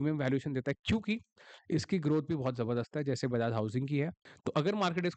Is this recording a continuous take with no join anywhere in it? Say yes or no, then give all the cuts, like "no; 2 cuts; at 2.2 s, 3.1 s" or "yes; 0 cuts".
no; 1 cut; at 4.3 s